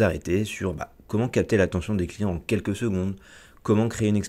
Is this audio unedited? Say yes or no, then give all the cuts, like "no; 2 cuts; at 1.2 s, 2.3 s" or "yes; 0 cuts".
yes; 0 cuts